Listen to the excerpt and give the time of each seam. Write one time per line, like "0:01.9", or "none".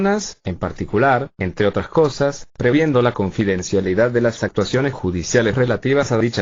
0:01.0

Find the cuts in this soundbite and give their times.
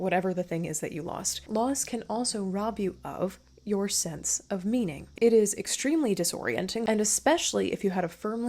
0:01.3
0:05.1
0:06.8

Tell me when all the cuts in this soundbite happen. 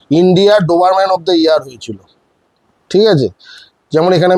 none

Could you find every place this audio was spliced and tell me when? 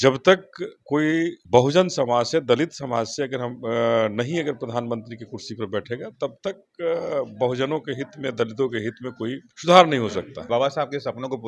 0:01.4
0:09.5
0:10.4

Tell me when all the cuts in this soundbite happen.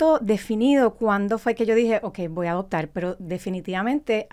none

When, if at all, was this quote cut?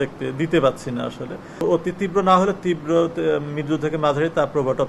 0:01.6

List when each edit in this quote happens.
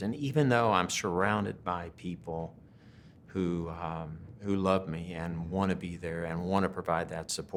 none

